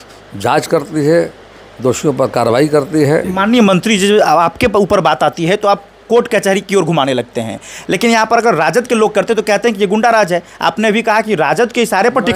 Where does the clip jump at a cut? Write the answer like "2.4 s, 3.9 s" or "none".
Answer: 3.3 s